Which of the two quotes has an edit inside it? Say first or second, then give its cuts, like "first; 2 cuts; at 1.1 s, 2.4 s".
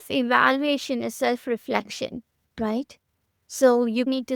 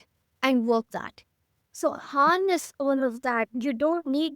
second; 1 cut; at 0.9 s